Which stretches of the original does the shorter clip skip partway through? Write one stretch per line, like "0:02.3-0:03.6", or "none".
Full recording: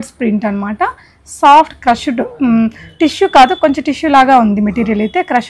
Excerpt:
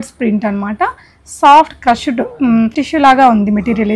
0:02.8-0:03.9

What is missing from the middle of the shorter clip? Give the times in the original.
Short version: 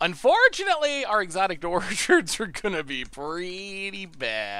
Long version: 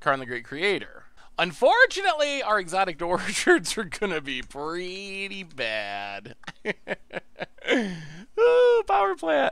none

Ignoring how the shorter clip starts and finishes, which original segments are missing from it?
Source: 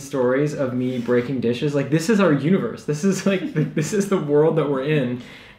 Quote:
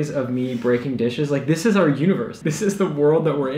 0:02.8-0:03.7

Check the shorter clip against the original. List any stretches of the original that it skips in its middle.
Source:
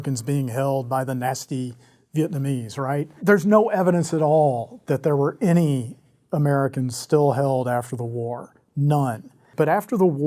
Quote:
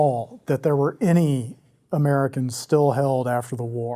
none

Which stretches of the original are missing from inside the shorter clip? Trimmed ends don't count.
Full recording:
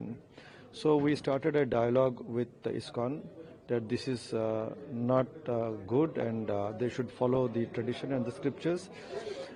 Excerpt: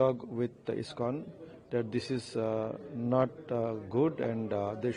none

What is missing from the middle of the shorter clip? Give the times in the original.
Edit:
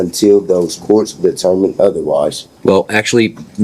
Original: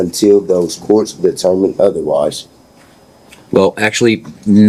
0:02.5-0:03.4

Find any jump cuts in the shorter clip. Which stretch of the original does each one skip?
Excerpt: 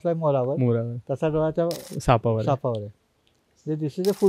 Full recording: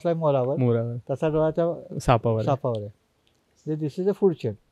none

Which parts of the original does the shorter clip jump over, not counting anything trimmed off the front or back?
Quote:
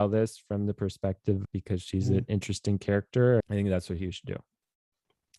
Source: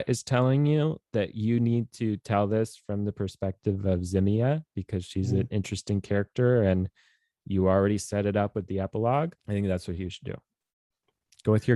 0:03.8-0:04.6
0:06.6-0:09.4

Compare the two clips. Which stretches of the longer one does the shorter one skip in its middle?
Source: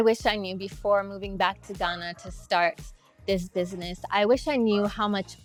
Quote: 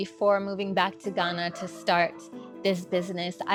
none

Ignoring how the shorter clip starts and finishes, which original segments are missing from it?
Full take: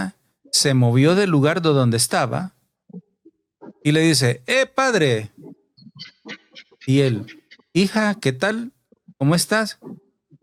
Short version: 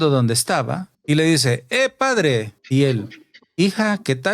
0:02.5-0:03.7
0:05.3-0:06.7

